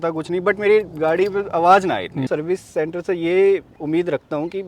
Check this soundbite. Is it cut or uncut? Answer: cut